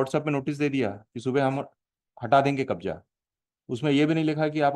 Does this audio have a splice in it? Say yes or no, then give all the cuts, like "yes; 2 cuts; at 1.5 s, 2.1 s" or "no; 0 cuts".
no; 0 cuts